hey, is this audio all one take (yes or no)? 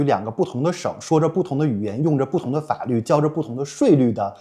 yes